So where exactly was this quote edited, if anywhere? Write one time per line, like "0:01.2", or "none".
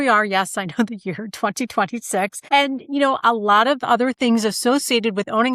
0:02.4